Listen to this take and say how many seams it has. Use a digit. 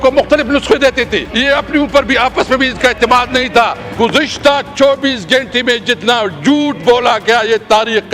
2